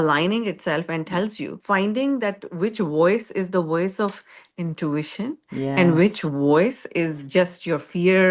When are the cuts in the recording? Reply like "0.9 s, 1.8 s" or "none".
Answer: 1.6 s